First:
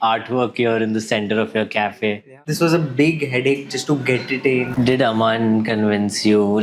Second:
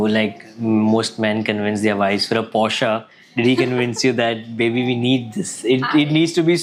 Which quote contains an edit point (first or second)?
first